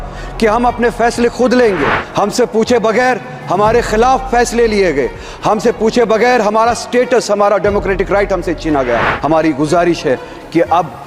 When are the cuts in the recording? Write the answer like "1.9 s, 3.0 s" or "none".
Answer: 2.0 s, 9.1 s